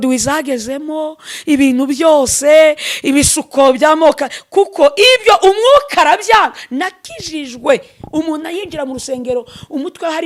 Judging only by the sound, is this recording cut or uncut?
uncut